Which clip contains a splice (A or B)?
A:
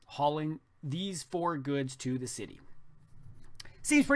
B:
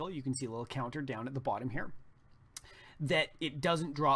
B